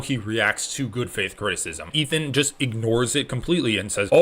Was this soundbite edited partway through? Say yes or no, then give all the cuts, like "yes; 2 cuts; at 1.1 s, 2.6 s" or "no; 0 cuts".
yes; 1 cut; at 1.9 s